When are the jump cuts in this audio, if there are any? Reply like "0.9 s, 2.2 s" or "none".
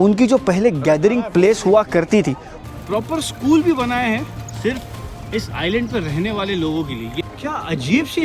2.5 s, 7.1 s